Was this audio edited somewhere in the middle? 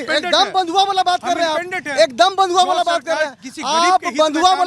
no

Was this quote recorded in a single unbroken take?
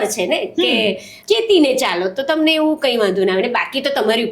no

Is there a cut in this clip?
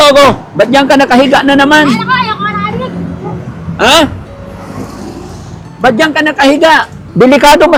no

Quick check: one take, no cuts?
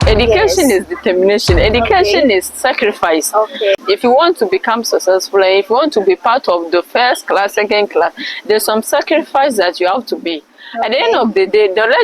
no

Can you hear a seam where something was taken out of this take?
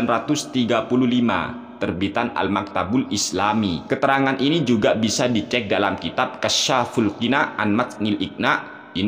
yes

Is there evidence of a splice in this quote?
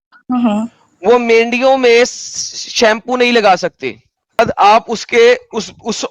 yes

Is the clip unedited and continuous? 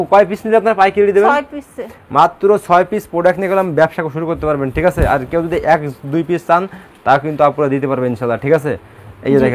yes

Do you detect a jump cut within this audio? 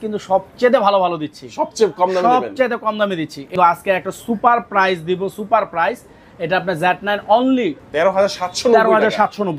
yes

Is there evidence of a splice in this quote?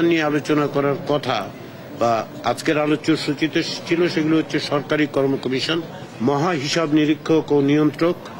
yes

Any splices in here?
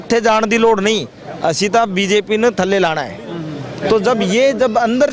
no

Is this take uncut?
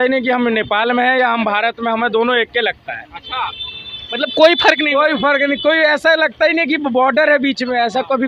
yes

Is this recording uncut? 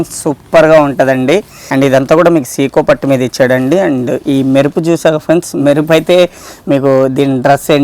no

